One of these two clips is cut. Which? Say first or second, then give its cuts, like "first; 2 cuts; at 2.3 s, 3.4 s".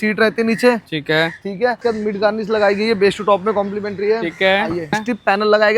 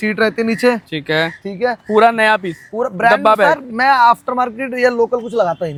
first; 2 cuts; at 1.8 s, 5.0 s